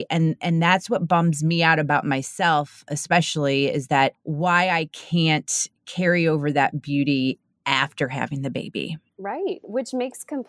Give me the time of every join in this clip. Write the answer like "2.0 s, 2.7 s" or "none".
4.2 s, 9.1 s